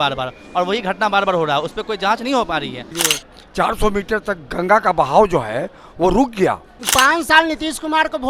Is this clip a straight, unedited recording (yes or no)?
no